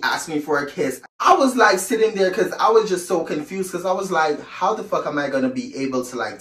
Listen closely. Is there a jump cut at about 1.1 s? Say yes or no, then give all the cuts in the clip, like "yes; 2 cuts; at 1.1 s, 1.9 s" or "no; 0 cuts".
yes; 1 cut; at 1.1 s